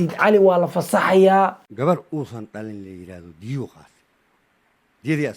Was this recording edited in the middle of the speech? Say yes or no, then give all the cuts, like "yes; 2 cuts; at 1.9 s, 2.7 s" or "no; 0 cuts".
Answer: yes; 1 cut; at 1.7 s